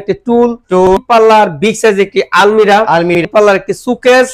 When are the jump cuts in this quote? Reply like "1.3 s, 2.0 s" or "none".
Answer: 1.0 s, 3.2 s